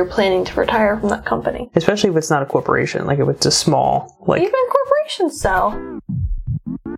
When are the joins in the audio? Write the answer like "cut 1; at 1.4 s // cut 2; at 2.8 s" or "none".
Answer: cut 1; at 5.8 s